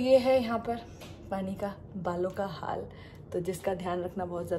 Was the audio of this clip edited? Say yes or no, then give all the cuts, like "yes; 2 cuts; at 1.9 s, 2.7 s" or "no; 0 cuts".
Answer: no; 0 cuts